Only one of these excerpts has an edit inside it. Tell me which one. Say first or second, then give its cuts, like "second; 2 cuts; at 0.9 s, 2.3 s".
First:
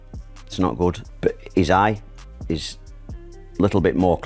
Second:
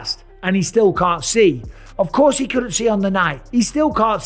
first; 1 cut; at 1.1 s